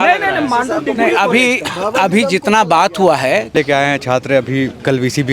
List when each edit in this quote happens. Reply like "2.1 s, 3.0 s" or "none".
3.5 s